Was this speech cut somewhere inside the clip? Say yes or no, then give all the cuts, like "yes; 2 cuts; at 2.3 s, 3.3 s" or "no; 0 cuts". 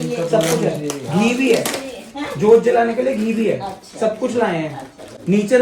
no; 0 cuts